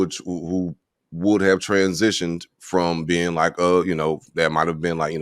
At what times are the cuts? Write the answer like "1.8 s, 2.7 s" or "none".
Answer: none